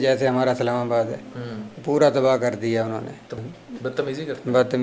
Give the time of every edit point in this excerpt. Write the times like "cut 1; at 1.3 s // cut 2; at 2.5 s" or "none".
cut 1; at 3.3 s